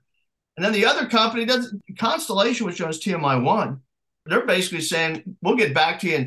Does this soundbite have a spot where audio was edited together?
yes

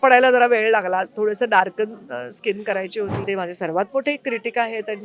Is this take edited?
yes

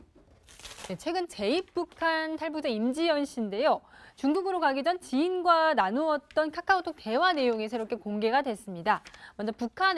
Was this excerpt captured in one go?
yes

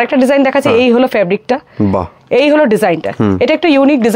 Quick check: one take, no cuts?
yes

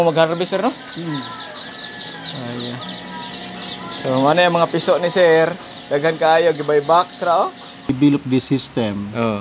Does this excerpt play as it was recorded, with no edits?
no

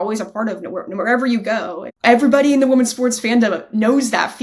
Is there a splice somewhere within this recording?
yes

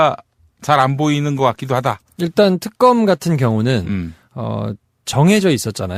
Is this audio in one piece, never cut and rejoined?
yes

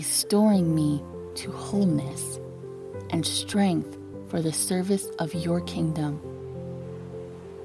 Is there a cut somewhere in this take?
no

